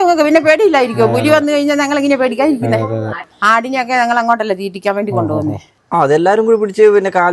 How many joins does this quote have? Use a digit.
2